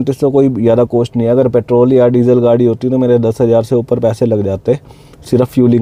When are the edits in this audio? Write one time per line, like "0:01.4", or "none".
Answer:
none